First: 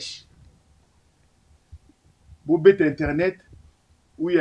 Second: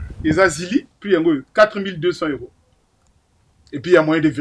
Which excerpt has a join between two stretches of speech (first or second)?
second